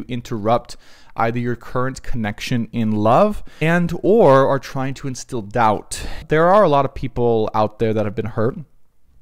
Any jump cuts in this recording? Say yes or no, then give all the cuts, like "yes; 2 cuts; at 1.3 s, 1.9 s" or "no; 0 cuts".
yes; 2 cuts; at 3.5 s, 6.2 s